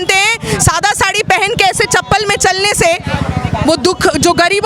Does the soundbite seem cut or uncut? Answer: uncut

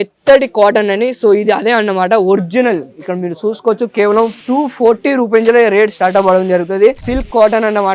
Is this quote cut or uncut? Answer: cut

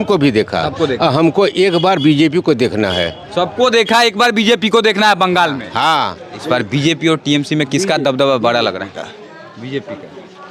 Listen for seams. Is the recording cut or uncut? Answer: cut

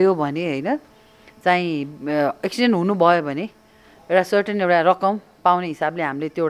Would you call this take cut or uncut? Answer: uncut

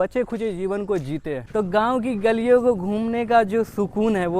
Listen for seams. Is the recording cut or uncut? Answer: cut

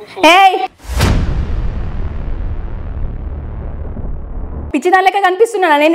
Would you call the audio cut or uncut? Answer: cut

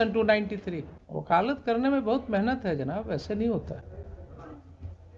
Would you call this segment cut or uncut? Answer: uncut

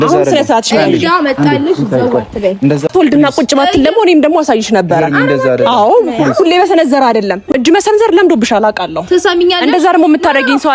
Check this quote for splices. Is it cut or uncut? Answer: cut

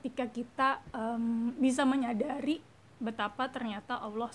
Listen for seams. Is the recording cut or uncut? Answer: uncut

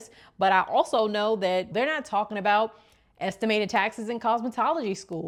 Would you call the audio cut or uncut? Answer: uncut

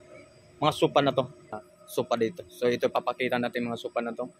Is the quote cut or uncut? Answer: cut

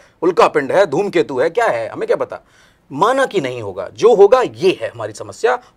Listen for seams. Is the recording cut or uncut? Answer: uncut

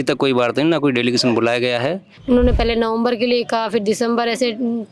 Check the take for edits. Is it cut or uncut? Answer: cut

